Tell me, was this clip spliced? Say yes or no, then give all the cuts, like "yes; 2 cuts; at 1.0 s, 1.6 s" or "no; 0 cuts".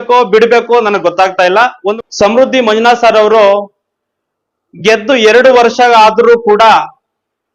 yes; 1 cut; at 1.9 s